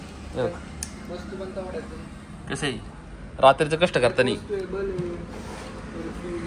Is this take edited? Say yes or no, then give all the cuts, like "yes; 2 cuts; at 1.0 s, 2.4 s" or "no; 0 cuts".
no; 0 cuts